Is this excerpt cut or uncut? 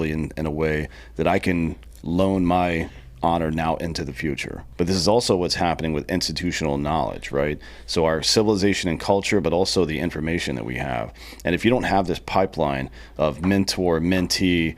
cut